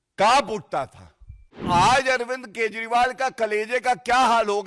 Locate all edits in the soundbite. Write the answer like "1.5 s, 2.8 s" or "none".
1.6 s

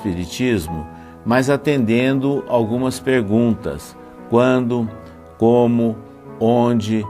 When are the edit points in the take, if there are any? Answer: 1.3 s

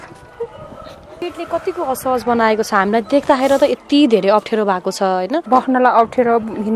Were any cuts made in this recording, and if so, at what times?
1.2 s, 5.4 s

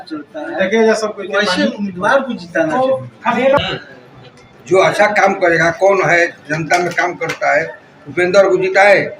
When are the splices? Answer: 3.6 s

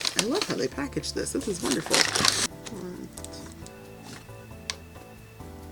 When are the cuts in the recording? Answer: 2.4 s

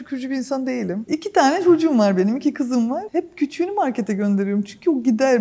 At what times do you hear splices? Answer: none

